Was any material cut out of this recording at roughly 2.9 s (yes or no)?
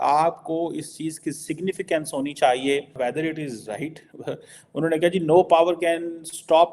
yes